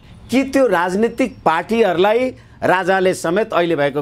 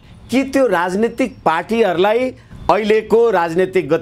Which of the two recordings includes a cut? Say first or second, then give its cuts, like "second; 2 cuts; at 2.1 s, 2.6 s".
second; 1 cut; at 2.4 s